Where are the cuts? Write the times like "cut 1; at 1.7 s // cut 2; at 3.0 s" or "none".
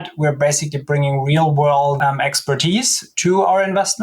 cut 1; at 2.0 s